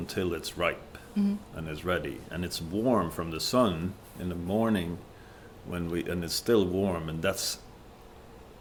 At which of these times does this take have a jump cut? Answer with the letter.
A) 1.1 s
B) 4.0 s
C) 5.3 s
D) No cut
D